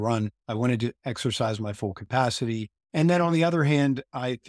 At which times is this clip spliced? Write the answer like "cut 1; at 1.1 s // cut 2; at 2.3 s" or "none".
cut 1; at 1.0 s // cut 2; at 2.8 s